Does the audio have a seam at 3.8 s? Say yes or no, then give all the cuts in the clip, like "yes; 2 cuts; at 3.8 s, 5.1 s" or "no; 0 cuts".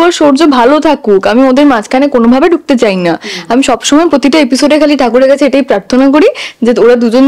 no; 0 cuts